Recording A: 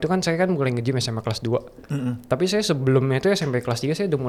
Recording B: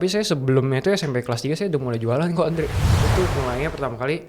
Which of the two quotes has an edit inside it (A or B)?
B